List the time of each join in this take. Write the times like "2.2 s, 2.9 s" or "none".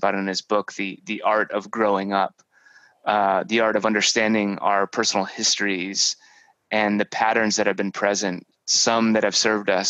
none

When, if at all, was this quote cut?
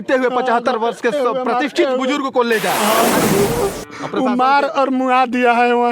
3.2 s

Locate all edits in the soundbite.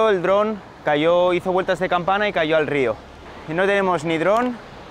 3.2 s

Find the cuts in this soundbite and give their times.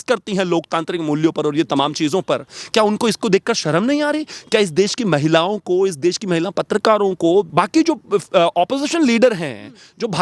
7.5 s

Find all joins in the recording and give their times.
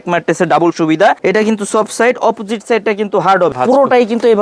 1.2 s, 3.5 s

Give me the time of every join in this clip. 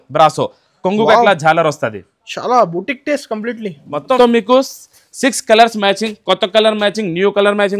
4.2 s

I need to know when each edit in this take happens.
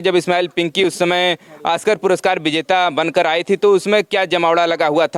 none

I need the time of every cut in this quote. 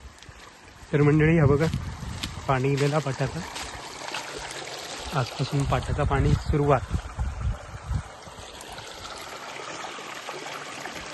none

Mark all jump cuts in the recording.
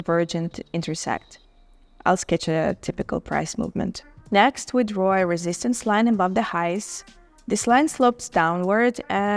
4.1 s

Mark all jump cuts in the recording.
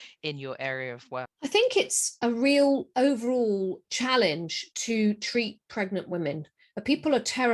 1.3 s

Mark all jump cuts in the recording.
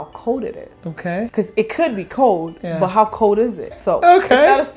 1.3 s, 3.7 s

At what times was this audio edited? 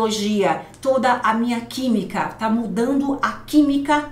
none

